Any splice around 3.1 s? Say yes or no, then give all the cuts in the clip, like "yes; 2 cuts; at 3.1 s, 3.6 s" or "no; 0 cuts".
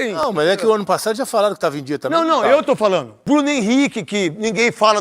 yes; 1 cut; at 3.1 s